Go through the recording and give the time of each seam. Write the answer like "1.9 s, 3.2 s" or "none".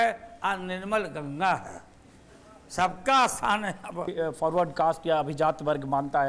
4.1 s